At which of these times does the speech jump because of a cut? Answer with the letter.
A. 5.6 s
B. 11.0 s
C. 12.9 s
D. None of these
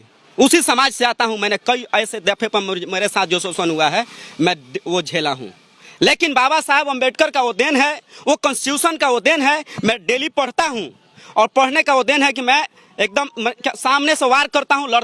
D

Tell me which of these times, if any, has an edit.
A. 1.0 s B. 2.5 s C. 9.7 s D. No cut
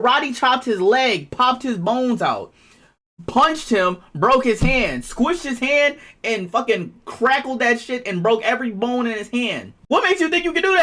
C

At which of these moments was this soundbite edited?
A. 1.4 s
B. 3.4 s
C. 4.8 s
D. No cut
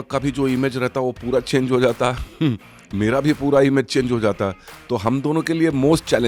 D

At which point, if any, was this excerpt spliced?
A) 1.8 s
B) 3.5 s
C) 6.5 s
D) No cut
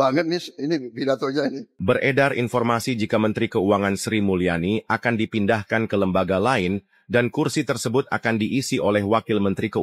A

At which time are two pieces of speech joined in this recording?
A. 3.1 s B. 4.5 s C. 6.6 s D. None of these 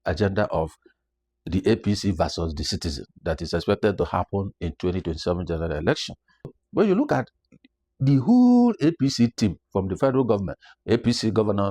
C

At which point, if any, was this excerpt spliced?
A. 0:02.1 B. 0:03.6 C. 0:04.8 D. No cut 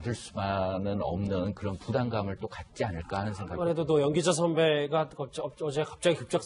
A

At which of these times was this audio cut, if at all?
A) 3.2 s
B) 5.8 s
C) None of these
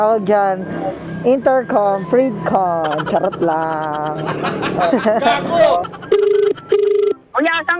B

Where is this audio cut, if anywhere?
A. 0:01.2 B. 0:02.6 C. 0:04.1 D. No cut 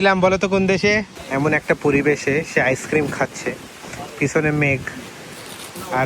A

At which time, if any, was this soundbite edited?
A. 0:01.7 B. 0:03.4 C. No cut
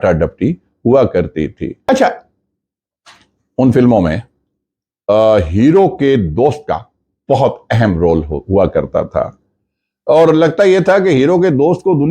A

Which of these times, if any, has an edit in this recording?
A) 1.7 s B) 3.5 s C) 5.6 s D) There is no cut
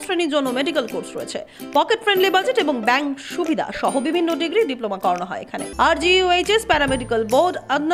C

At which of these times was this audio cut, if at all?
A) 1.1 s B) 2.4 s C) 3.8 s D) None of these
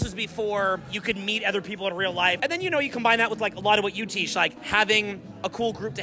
B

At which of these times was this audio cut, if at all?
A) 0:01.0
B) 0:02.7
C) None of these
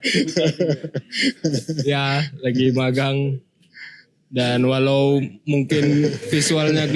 C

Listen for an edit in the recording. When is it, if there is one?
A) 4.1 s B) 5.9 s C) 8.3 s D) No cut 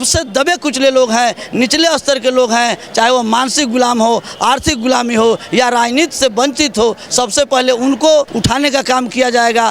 C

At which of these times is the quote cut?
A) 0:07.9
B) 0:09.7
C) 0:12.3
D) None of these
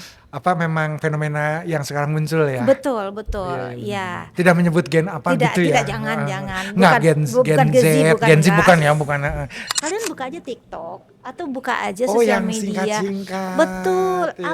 B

